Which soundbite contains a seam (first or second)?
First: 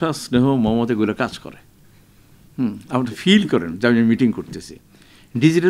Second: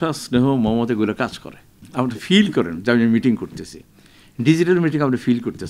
second